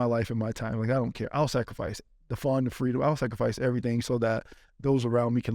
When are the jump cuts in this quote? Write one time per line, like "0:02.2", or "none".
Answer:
none